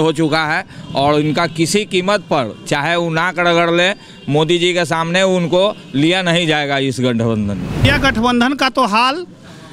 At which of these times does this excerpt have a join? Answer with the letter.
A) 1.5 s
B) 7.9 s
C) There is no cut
B